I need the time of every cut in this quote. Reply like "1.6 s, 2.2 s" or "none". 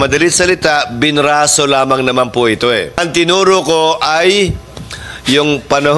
3.0 s